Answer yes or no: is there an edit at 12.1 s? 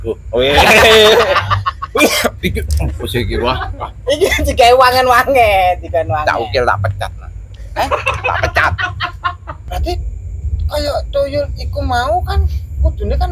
no